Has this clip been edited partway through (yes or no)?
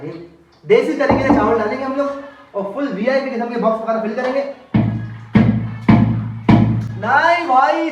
no